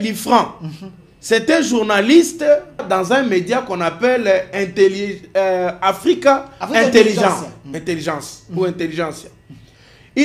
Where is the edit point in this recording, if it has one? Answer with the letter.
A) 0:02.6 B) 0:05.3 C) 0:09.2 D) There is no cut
D